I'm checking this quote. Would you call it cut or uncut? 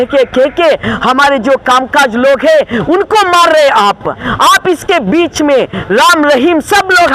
cut